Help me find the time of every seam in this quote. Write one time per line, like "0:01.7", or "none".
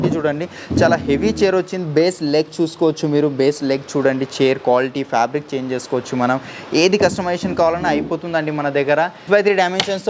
none